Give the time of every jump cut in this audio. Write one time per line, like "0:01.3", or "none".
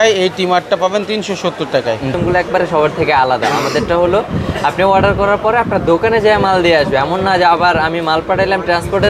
0:02.1